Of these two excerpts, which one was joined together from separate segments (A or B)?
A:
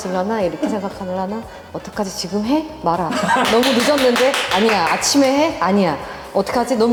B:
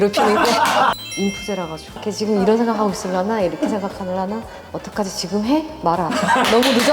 B